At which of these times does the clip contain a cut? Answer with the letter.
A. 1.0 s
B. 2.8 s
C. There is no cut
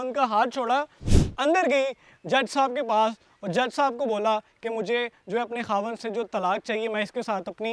C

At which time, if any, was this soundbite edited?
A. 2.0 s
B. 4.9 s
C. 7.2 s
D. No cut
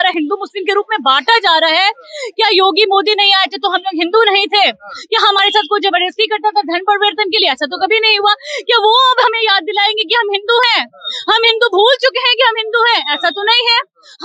D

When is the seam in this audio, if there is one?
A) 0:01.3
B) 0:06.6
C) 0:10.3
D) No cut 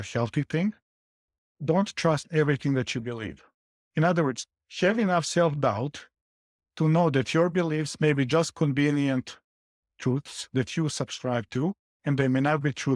A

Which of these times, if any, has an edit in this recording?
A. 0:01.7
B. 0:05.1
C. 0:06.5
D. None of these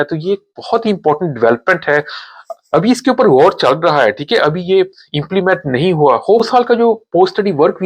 C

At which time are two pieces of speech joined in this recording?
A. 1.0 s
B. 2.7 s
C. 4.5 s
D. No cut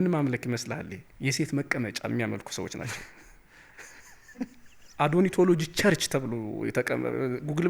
A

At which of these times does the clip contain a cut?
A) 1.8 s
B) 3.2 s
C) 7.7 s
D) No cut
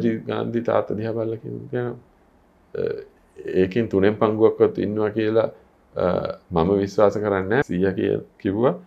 C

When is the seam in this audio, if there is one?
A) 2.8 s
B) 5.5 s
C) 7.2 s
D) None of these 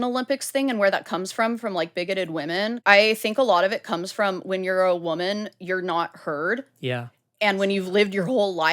A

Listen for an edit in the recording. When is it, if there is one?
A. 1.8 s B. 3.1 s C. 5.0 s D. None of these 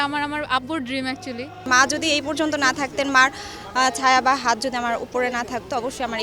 A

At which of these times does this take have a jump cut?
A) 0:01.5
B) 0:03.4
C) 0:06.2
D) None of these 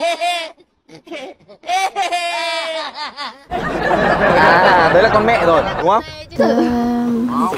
C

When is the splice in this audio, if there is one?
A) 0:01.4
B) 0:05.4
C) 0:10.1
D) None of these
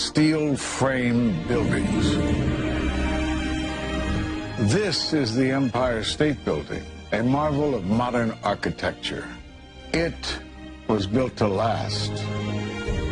A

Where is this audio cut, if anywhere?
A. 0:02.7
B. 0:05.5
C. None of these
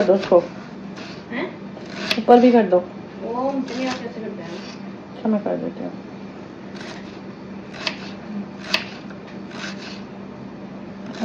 C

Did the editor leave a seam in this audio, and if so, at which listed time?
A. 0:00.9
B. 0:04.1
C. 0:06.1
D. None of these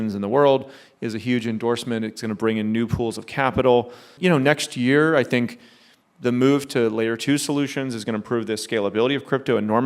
B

